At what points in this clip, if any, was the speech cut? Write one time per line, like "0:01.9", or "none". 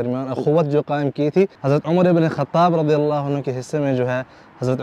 0:01.6